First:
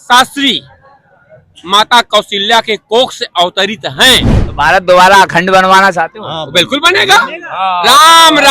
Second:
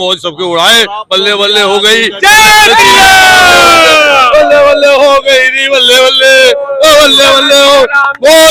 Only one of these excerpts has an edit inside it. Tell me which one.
first; 1 cut; at 4.4 s

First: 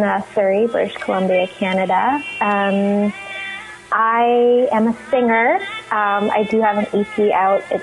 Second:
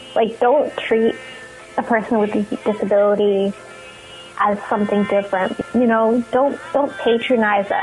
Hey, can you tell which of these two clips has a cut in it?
second; 1 cut; at 5.6 s

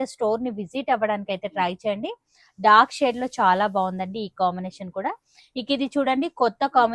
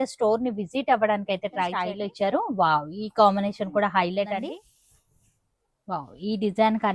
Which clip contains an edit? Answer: second; 2 cuts; at 1.9 s, 4.5 s

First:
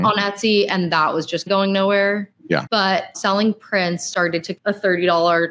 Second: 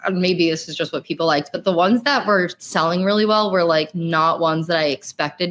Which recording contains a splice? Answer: first; 3 cuts; at 1.5 s, 3.1 s, 4.5 s

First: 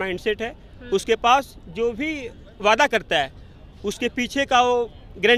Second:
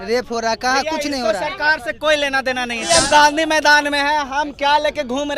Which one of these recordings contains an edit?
second; 1 cut; at 2.8 s

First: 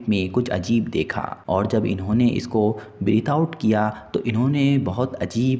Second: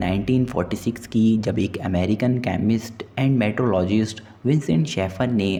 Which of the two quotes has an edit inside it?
first; 1 cut; at 1.3 s

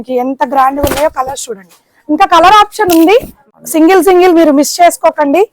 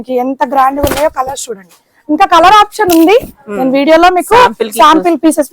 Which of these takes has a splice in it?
first; 1 cut; at 3.4 s

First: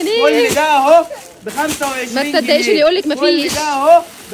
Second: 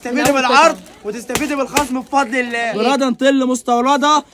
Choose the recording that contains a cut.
second; 1 cut; at 2.6 s

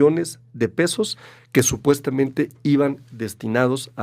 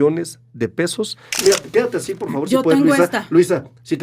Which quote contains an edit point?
second; 1 cut; at 1.4 s

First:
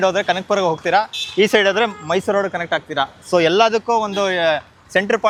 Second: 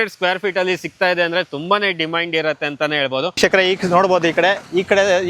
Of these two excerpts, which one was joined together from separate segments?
second; 1 cut; at 3.4 s

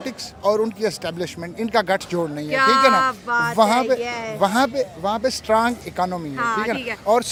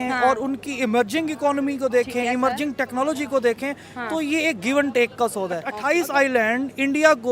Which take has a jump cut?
second; 1 cut; at 5.7 s

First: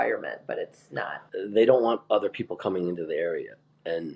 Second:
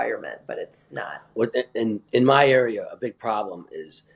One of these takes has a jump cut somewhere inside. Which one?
first; 1 cut; at 1.2 s

